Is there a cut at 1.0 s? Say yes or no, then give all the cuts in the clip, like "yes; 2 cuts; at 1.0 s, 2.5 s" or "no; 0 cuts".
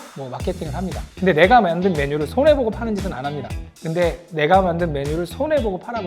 yes; 1 cut; at 1.0 s